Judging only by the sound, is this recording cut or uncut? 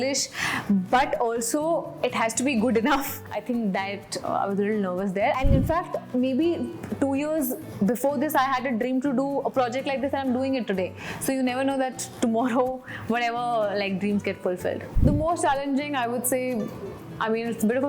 cut